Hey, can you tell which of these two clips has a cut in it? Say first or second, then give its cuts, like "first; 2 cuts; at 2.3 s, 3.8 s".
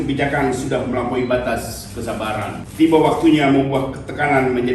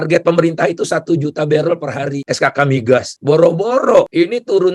first; 1 cut; at 2.6 s